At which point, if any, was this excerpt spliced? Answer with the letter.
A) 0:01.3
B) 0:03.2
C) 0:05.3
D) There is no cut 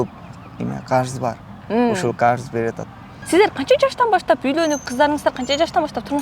B